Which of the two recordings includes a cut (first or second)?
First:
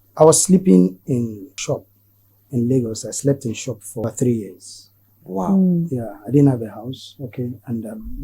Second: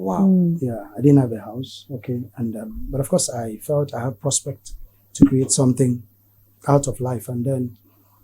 first